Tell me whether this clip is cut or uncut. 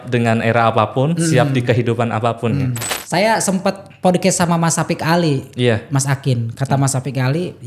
cut